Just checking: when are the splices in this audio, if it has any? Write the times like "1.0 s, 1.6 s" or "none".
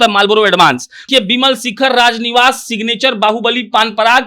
1.0 s